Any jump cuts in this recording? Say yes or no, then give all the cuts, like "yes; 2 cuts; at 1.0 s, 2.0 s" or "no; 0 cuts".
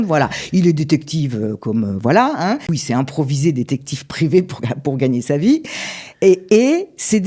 yes; 1 cut; at 2.7 s